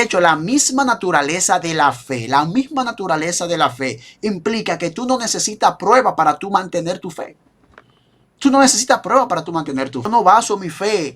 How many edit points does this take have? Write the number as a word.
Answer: one